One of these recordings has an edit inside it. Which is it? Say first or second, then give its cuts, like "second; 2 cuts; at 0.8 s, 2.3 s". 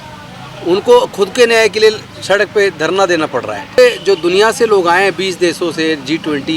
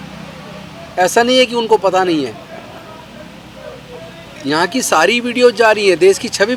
first; 1 cut; at 3.8 s